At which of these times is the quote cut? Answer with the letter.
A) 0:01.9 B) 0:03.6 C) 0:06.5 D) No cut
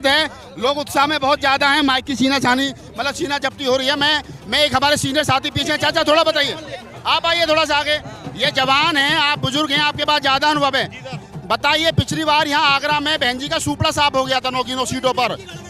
D